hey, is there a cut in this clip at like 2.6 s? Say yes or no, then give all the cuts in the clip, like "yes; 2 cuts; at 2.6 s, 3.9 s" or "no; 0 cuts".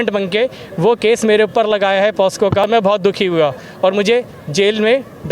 yes; 1 cut; at 2.6 s